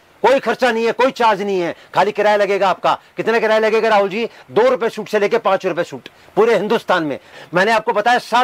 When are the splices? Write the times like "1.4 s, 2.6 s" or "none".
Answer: 7.3 s